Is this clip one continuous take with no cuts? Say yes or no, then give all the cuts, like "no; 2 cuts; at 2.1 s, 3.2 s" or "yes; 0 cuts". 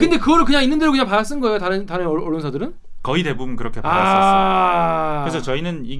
yes; 0 cuts